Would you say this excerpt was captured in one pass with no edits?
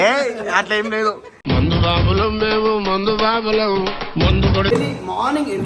no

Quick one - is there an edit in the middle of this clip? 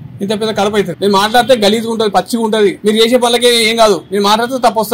yes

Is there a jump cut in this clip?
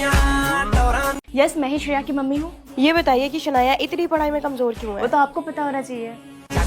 yes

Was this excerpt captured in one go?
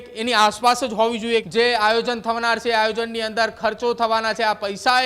no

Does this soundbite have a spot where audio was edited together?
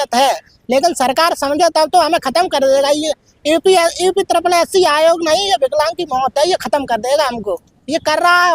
no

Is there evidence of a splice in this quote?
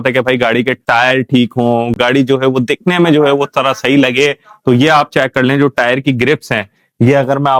no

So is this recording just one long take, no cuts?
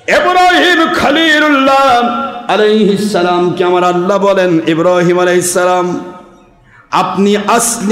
yes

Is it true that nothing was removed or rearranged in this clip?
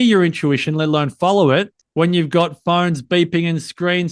no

